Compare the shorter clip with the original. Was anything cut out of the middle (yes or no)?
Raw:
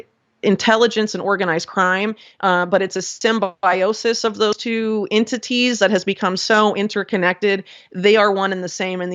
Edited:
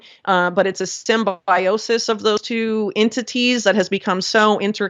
no